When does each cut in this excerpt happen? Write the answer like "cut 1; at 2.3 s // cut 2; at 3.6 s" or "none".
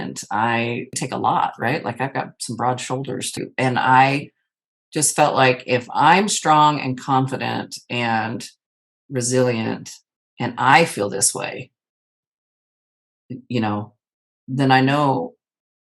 cut 1; at 1.0 s // cut 2; at 3.4 s

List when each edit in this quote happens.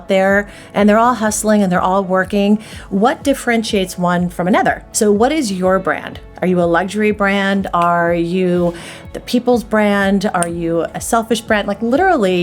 cut 1; at 4.9 s

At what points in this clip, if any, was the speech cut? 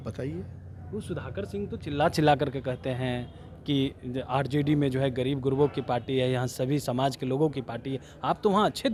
none

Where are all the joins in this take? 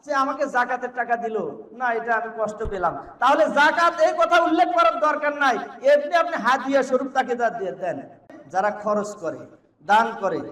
cut 1; at 8.3 s

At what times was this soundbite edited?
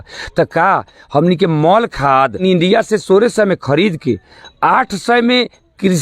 cut 1; at 2.4 s

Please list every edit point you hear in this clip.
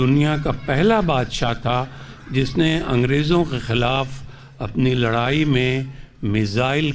none

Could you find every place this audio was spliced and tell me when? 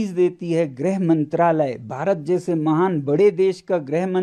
none

